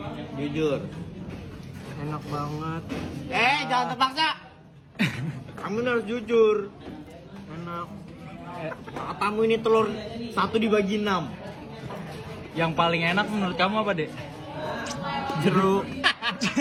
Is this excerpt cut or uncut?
uncut